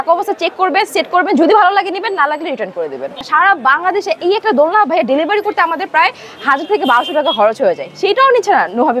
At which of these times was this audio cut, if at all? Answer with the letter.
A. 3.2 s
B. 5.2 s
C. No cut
A